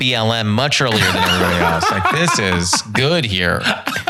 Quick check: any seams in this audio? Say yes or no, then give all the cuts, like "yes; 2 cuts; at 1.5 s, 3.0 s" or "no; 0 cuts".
no; 0 cuts